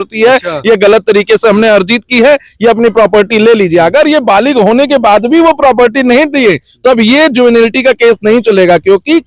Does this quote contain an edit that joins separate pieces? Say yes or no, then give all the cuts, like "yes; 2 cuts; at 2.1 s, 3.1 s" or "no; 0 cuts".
no; 0 cuts